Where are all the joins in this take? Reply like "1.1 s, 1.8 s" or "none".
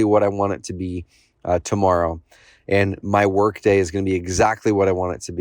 none